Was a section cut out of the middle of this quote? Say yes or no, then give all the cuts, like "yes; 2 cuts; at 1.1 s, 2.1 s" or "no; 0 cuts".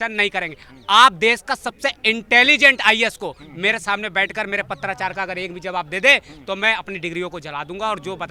no; 0 cuts